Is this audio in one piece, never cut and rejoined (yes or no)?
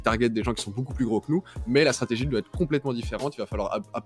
yes